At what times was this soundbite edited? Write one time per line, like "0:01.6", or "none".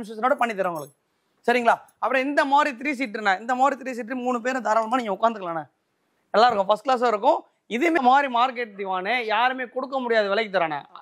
0:08.0